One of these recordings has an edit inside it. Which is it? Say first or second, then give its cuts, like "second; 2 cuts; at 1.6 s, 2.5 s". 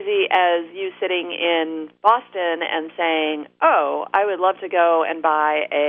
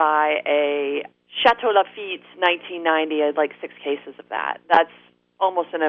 first; 1 cut; at 1.9 s